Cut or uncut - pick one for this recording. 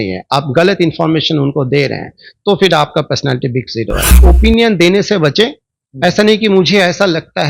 cut